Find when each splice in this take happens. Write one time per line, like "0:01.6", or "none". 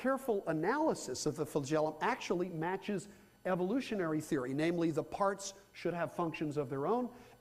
0:05.8